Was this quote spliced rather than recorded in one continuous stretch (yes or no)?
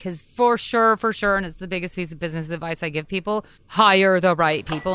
yes